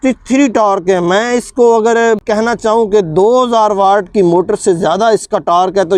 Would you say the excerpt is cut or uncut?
uncut